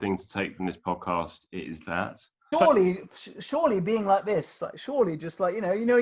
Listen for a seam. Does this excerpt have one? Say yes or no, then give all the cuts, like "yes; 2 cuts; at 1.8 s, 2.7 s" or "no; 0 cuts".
yes; 1 cut; at 2.5 s